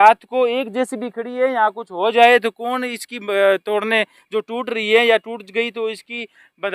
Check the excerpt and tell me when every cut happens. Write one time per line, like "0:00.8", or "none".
none